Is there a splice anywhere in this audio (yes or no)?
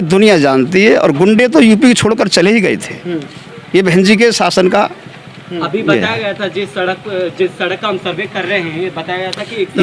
no